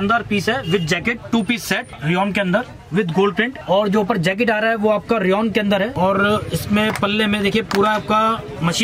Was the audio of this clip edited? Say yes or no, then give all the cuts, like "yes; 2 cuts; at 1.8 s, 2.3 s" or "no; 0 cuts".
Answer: yes; 1 cut; at 1.9 s